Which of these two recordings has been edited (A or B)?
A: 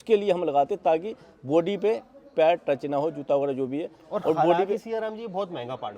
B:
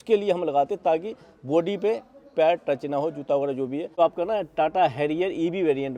B